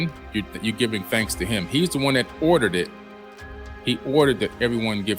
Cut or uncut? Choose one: uncut